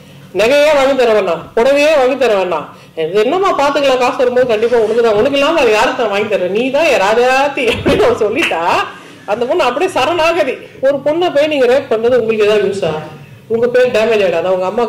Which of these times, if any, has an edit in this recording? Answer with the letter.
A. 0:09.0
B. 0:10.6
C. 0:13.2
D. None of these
B